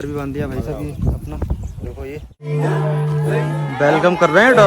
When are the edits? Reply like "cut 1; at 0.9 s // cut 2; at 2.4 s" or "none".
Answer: cut 1; at 2.5 s